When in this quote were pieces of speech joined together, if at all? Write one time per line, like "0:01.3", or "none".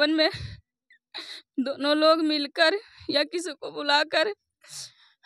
none